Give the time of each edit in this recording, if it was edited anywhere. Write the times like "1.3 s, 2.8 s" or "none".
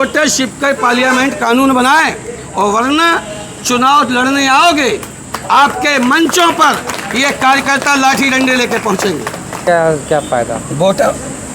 9.6 s